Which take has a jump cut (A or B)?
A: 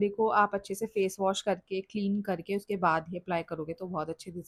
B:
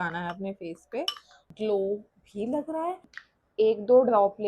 B